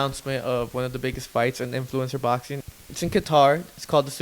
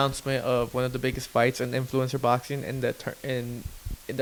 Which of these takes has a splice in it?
first; 1 cut; at 2.6 s

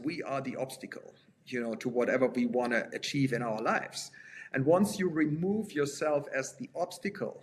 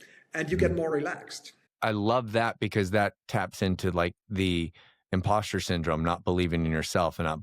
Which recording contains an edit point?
second; 1 cut; at 1.7 s

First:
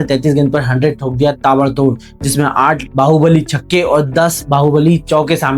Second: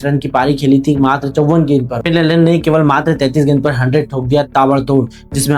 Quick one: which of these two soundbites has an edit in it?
second; 1 cut; at 1.9 s

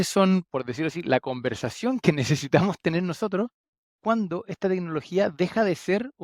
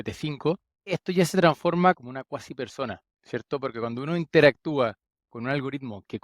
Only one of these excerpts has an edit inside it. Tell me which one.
second; 2 cuts; at 1.0 s, 2.0 s

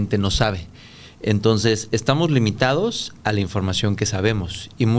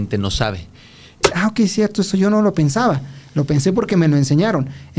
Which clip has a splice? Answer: second; 1 cut; at 1.1 s

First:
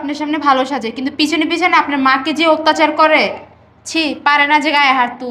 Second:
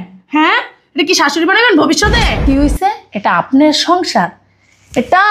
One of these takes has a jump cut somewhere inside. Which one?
second; 1 cut; at 2.3 s

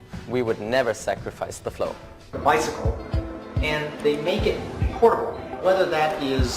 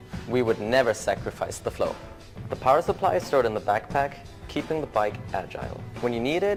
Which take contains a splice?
first; 1 cut; at 2.2 s

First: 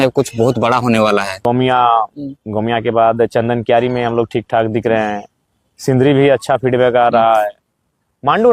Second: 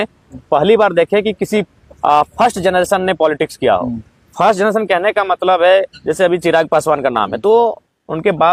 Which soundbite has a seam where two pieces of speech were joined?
first; 1 cut; at 1.4 s

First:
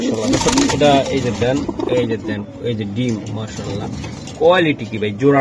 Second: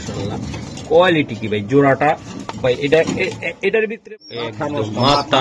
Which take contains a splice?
second; 1 cut; at 4.0 s

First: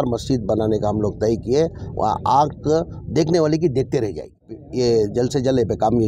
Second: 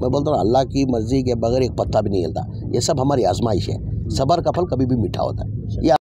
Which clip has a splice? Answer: first; 1 cut; at 4.6 s

